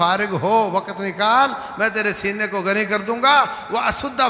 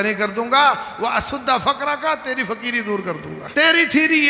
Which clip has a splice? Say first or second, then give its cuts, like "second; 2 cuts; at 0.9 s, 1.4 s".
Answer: second; 1 cut; at 3.4 s